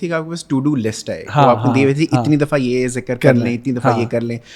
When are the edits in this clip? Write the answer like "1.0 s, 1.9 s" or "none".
none